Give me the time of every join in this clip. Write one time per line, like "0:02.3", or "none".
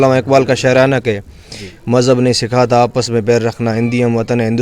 none